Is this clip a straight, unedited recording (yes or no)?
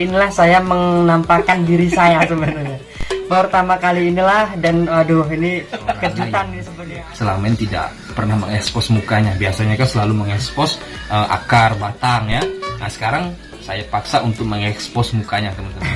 no